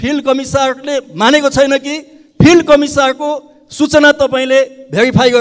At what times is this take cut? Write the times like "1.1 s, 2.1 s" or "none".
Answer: none